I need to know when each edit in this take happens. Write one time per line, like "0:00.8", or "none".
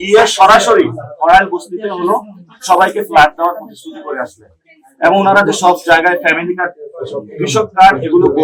none